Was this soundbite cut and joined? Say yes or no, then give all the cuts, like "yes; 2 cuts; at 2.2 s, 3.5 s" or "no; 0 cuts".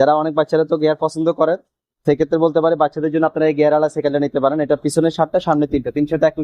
no; 0 cuts